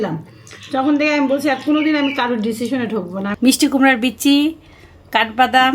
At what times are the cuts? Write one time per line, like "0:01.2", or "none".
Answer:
0:03.3